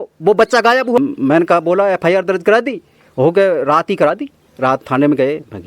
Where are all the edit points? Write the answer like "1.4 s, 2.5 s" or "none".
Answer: 1.0 s